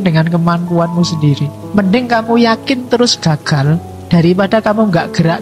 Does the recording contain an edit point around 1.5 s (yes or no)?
yes